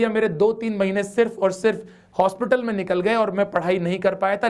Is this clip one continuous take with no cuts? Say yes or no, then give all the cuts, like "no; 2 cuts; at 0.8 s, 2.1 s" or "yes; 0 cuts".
yes; 0 cuts